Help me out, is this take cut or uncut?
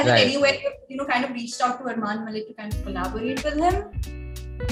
uncut